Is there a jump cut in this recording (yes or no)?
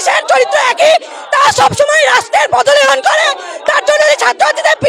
no